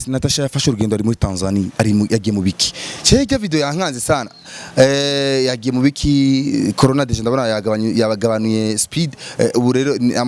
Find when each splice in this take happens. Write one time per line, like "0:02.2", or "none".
none